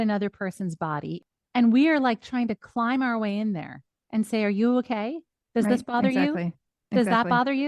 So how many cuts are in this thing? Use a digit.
1